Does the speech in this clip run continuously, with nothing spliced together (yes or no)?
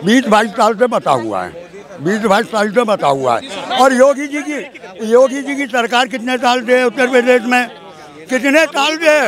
yes